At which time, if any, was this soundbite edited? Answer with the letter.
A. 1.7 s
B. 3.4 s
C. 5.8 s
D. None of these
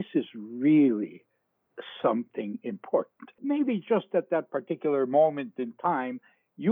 B